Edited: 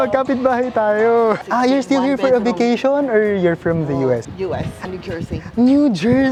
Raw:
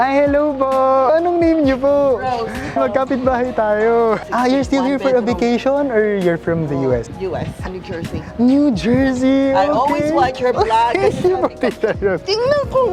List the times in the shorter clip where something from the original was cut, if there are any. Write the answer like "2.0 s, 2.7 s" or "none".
none